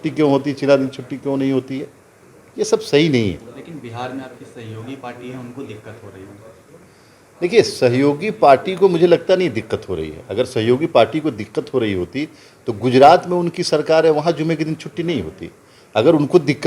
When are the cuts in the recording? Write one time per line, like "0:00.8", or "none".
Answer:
none